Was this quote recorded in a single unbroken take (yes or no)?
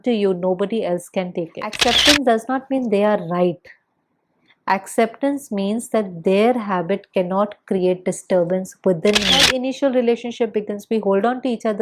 no